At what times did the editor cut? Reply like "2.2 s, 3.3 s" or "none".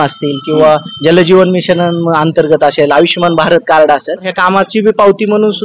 4.3 s